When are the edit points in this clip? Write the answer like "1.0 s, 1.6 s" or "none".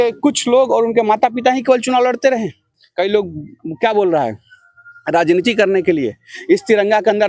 2.8 s